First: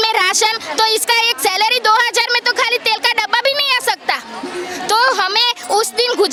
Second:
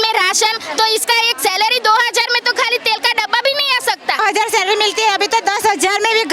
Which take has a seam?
second; 1 cut; at 4.2 s

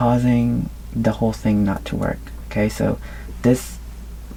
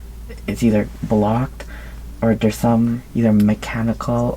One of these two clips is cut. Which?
second; 1 cut; at 3.0 s

